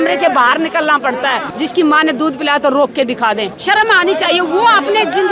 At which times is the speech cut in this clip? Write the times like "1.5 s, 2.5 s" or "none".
1.4 s, 3.5 s